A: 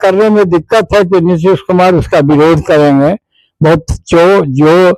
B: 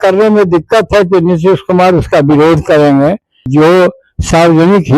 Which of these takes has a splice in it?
B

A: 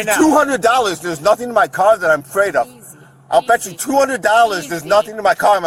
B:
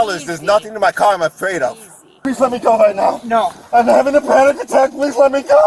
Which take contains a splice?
B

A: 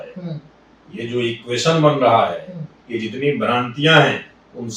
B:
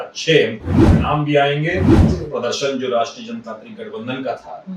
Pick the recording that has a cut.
B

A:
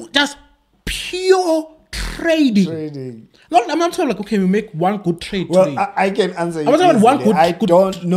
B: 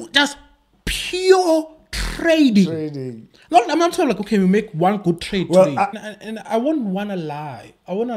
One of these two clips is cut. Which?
B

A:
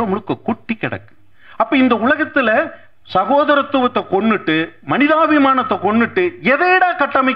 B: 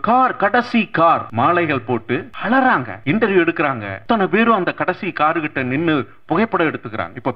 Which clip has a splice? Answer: B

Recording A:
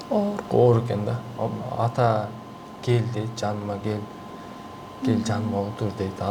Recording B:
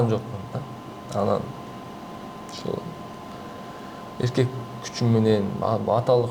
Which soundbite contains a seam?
A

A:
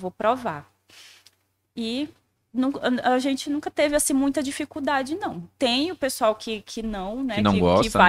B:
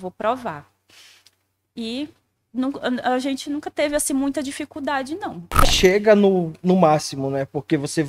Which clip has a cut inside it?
B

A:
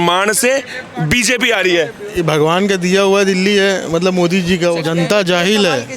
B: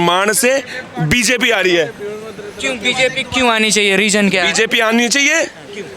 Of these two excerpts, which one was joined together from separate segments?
A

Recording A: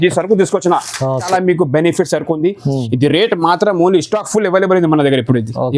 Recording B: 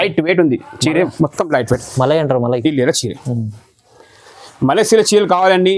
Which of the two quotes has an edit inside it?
A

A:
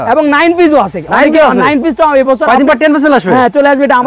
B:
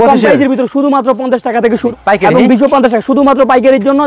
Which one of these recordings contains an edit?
B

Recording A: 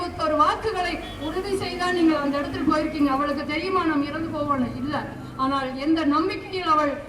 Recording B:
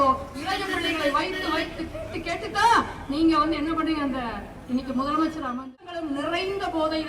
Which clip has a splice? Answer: B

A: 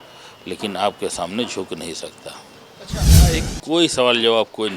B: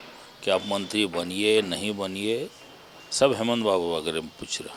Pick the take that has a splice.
A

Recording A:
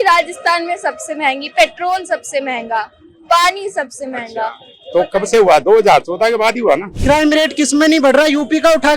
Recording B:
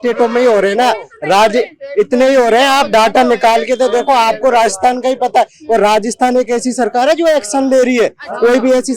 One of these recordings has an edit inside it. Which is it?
A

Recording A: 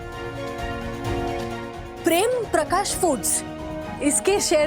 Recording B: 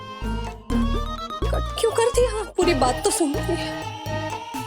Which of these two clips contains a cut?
B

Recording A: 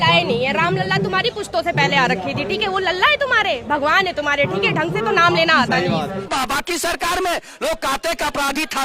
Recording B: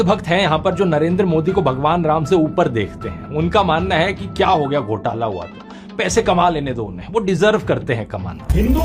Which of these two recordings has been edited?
A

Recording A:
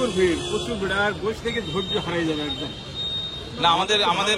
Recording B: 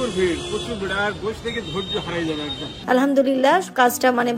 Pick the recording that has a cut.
B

